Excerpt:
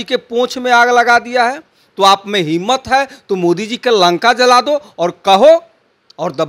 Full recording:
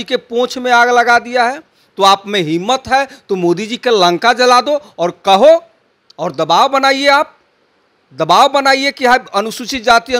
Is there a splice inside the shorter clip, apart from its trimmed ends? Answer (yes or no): no